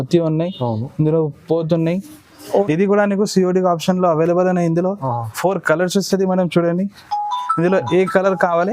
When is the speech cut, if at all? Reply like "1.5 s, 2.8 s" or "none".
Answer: 2.6 s